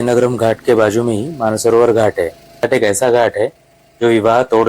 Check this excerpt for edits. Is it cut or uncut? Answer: cut